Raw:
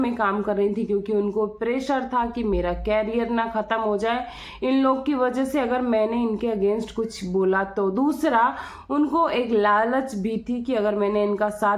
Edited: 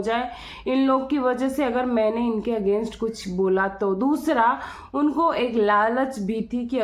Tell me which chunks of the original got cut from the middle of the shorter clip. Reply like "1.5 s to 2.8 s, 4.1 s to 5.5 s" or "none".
none

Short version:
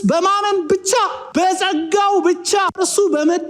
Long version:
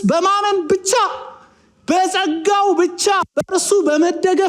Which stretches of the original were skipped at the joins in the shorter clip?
1.2 s to 1.7 s, 3.3 s to 3.5 s

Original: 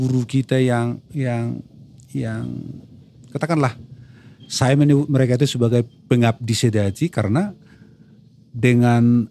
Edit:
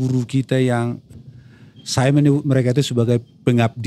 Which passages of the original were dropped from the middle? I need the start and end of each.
1.1 s to 3.8 s

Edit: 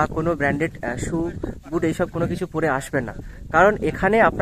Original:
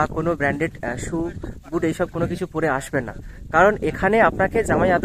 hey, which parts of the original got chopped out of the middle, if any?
none

